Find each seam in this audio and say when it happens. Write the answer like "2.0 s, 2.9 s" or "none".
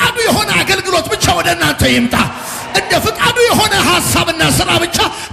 none